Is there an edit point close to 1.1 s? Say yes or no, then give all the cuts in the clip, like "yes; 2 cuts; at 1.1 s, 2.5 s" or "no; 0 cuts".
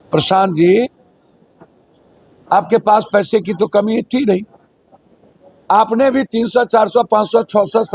no; 0 cuts